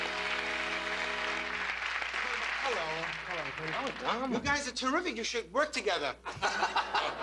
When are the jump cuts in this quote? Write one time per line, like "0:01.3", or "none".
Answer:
none